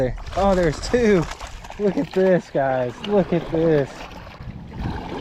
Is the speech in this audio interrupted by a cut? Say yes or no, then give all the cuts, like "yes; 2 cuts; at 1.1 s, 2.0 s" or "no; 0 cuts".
no; 0 cuts